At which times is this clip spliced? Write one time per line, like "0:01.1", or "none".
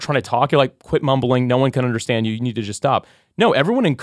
none